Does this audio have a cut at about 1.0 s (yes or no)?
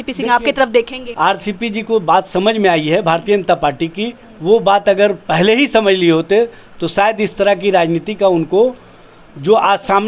yes